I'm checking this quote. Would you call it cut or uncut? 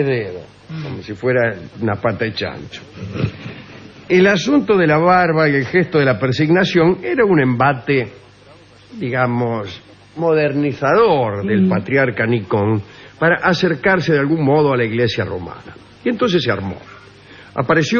uncut